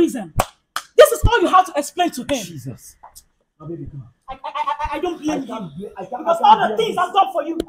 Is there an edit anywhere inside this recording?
no; 0 cuts

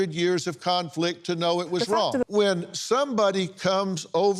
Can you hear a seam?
yes; 1 cut; at 2.2 s

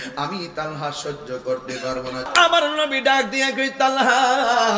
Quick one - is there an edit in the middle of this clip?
yes; 1 cut; at 2.3 s

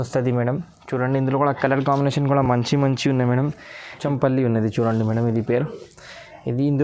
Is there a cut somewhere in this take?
yes; 1 cut; at 4.0 s

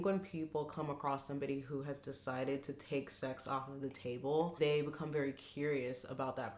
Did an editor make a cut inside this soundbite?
no; 0 cuts

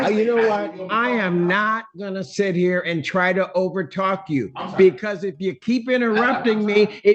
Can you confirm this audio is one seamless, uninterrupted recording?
yes; 0 cuts

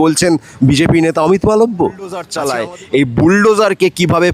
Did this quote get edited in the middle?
yes; 1 cut; at 2.3 s

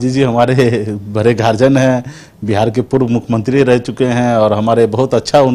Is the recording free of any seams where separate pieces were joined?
yes; 0 cuts

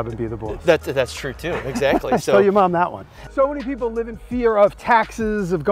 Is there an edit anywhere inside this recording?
no; 0 cuts

